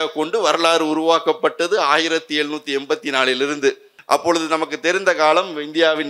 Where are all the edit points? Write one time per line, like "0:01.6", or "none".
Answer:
0:03.9